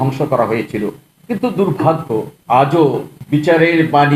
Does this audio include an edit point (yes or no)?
yes